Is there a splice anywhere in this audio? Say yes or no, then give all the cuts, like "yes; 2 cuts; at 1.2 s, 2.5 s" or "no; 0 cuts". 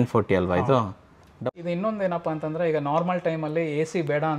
yes; 1 cut; at 1.4 s